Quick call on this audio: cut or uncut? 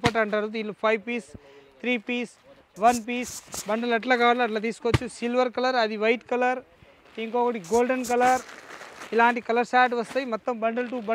uncut